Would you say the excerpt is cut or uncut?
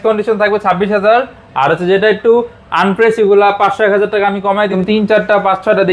cut